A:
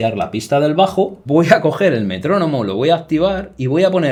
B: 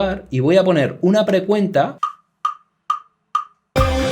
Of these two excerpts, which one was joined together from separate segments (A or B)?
B